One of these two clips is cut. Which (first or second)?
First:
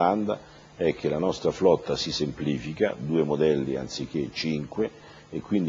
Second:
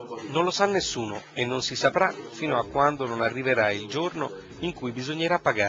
first